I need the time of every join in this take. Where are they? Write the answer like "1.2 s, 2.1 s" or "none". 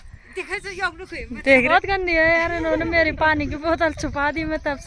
1.7 s